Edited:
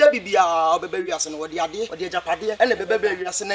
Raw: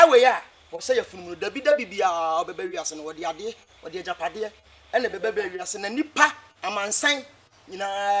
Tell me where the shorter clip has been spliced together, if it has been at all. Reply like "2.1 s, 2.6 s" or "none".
2.2 s